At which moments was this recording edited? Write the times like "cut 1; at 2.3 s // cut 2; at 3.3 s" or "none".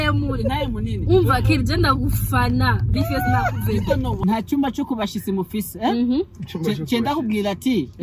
cut 1; at 4.2 s